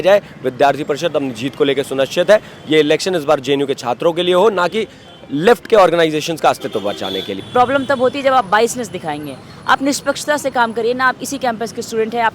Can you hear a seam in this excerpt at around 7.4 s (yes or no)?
yes